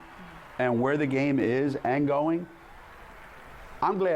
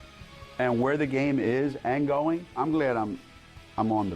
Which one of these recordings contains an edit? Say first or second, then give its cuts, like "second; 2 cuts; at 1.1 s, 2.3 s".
second; 1 cut; at 2.5 s